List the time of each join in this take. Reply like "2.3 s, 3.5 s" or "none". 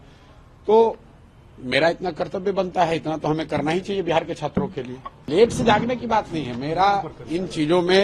5.3 s